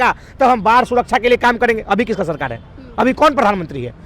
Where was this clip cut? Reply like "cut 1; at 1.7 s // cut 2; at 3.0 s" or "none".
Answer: none